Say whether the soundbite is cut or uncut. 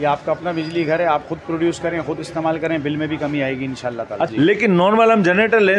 cut